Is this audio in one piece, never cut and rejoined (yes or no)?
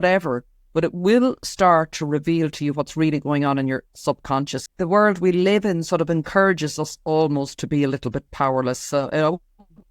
no